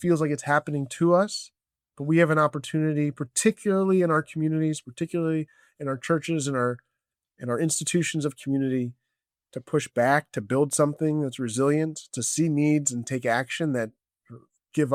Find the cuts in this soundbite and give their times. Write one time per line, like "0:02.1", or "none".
none